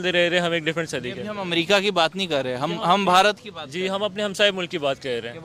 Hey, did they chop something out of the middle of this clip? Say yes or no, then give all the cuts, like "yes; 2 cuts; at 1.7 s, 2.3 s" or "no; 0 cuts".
no; 0 cuts